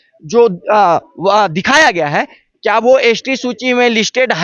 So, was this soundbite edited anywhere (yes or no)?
no